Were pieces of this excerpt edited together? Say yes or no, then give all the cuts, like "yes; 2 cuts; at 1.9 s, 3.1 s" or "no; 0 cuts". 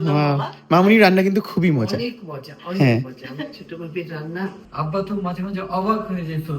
yes; 1 cut; at 4.6 s